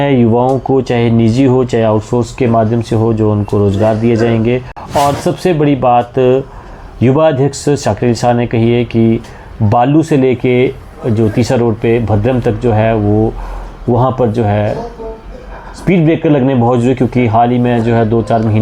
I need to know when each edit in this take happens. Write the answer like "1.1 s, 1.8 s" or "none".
none